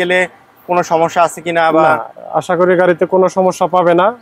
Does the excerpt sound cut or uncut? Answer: uncut